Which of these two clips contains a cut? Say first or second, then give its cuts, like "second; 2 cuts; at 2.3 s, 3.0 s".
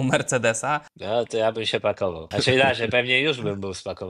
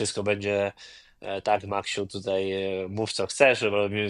first; 2 cuts; at 0.9 s, 2.2 s